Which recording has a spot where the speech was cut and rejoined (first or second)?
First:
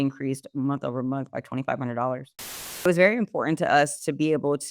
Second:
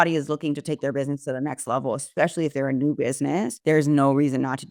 first